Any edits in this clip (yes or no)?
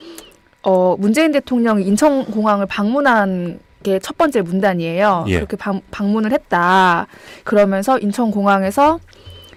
no